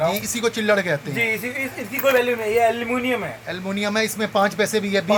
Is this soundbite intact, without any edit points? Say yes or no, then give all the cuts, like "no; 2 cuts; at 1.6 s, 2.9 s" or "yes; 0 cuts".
yes; 0 cuts